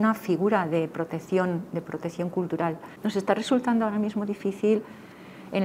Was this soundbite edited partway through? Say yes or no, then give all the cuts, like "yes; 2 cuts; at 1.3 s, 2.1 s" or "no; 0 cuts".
yes; 1 cut; at 2.9 s